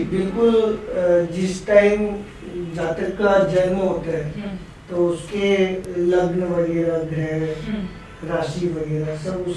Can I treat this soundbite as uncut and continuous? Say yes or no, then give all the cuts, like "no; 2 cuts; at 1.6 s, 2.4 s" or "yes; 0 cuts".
yes; 0 cuts